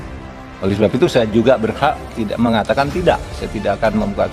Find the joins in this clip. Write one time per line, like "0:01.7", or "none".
0:01.6